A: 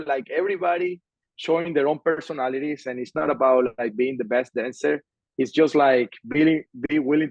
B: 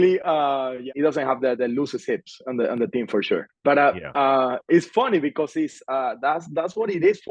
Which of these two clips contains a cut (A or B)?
B